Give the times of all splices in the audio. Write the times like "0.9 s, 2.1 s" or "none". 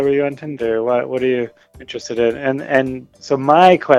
1.7 s, 3.1 s

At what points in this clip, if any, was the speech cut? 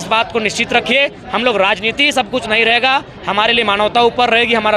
none

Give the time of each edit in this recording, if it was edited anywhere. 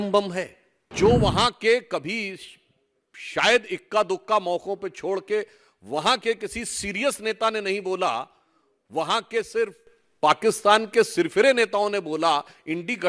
0.9 s

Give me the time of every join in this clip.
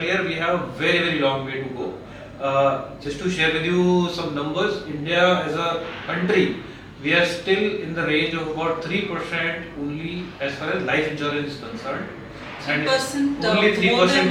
none

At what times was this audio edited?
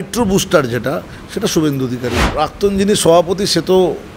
2.2 s

